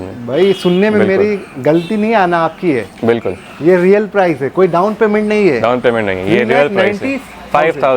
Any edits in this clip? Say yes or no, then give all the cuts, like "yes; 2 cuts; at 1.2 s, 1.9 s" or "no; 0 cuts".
no; 0 cuts